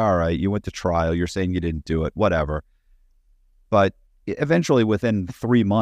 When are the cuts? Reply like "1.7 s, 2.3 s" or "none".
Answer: none